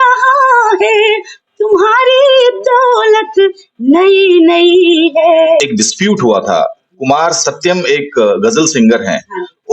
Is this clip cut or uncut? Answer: cut